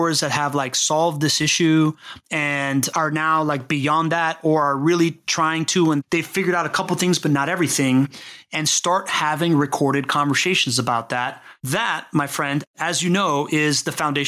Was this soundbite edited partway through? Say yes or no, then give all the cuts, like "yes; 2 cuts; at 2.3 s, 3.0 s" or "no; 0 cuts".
yes; 2 cuts; at 2.9 s, 11.6 s